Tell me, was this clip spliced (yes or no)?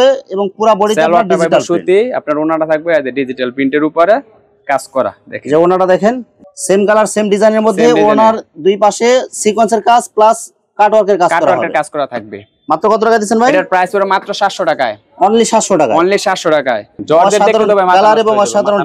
no